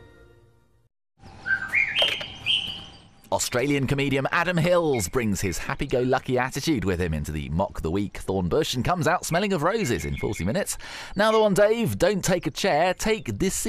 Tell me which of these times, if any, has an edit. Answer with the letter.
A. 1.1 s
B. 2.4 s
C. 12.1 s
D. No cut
A